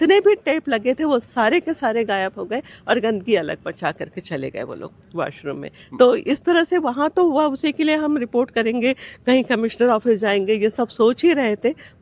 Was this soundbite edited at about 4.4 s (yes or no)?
no